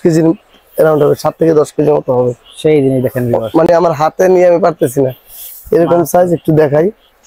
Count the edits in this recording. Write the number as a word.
zero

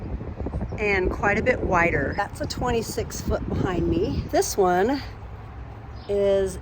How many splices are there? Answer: one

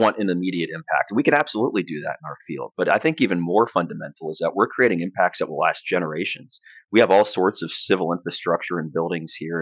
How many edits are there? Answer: zero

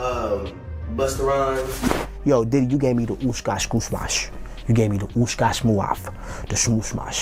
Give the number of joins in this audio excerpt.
zero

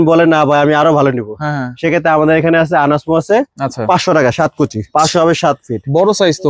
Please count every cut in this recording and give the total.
one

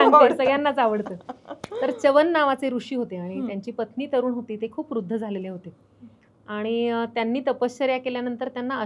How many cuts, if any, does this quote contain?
zero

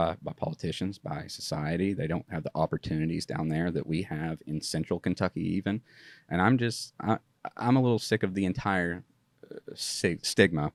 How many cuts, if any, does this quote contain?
zero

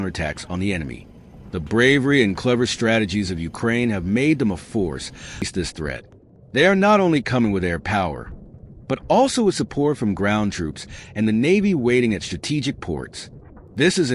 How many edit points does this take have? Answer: one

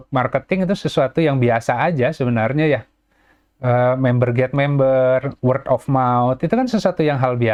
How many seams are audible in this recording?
zero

